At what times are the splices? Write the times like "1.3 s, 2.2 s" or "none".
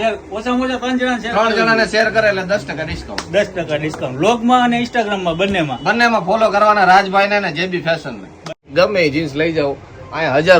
8.6 s